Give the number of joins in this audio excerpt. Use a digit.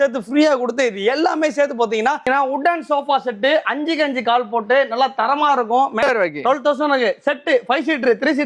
2